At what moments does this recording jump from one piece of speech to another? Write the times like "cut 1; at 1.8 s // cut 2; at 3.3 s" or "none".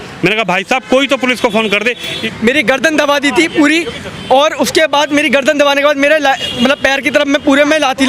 cut 1; at 2.2 s